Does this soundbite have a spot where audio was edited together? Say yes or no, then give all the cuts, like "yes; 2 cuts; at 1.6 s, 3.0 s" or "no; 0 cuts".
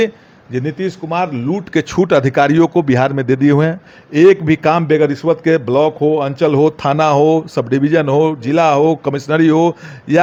no; 0 cuts